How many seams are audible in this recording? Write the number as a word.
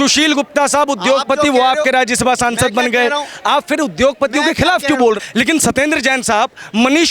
one